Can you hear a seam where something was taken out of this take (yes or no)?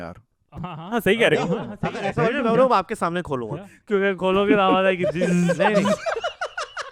no